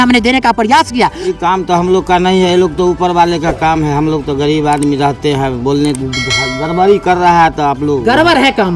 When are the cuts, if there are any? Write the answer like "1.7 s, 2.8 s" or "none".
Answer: 1.2 s